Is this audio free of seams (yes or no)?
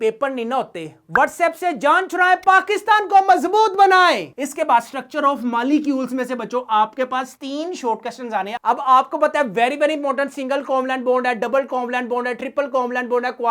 yes